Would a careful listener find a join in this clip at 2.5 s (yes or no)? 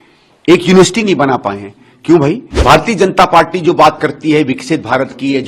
yes